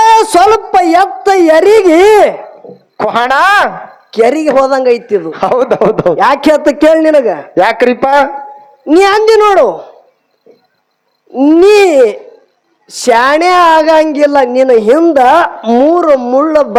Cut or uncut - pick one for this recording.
uncut